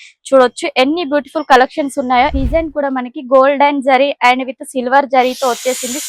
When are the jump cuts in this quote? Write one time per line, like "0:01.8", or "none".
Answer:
0:02.4